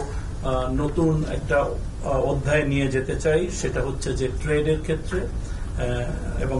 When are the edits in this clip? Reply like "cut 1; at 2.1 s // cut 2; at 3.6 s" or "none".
none